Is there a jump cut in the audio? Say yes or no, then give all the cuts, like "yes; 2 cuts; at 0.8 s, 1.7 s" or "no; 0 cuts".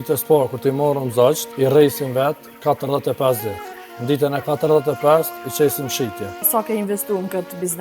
yes; 2 cuts; at 1.5 s, 6.4 s